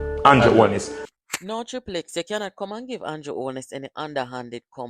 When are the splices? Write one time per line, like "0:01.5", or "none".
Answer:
none